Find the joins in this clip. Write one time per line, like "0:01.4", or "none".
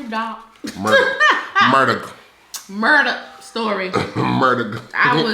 none

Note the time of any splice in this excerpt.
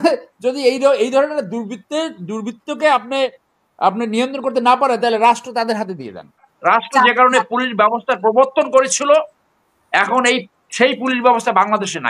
0:06.5

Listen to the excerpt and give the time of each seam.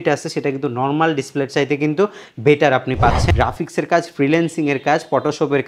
0:03.3

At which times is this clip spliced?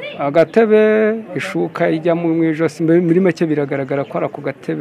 none

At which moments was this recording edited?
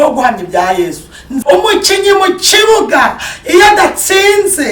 0:01.3

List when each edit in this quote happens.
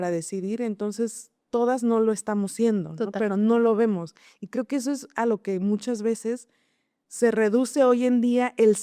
none

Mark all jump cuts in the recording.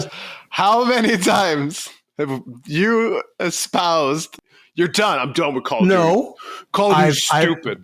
0:04.4

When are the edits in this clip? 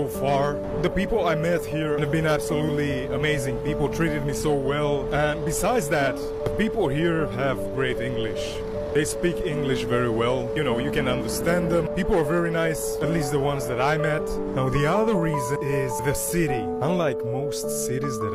none

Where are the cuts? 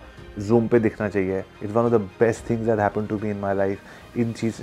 0:01.5

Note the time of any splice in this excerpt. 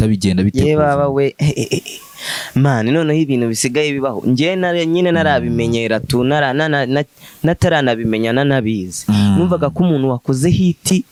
none

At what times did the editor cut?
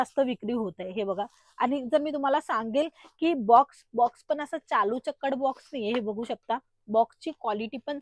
none

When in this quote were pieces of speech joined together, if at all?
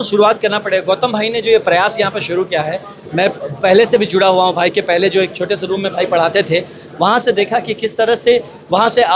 none

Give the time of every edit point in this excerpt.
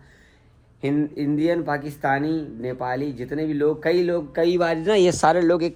none

